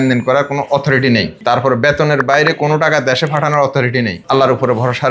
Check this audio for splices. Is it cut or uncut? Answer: cut